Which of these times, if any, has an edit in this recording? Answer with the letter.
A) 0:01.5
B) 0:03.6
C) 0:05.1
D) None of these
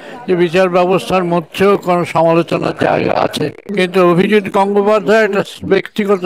B